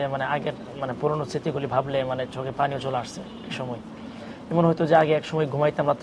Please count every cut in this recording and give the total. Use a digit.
0